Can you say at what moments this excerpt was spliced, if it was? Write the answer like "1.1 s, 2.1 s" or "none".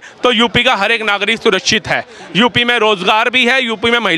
none